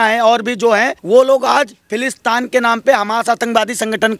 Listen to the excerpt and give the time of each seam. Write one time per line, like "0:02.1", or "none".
0:01.0